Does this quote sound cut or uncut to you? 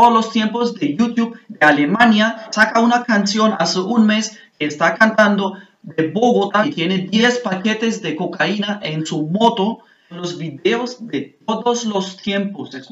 cut